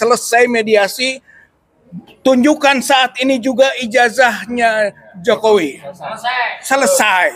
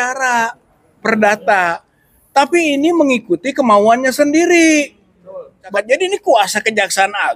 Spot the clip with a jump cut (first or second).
second